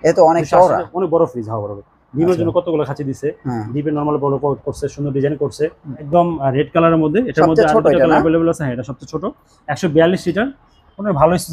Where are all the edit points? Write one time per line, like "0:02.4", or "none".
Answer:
0:06.0